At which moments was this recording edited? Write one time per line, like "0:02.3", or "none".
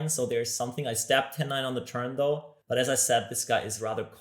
0:02.5